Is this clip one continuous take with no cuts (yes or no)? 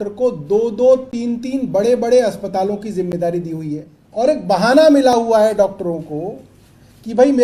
no